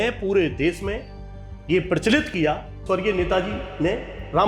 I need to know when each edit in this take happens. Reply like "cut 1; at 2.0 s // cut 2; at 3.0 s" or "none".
cut 1; at 2.9 s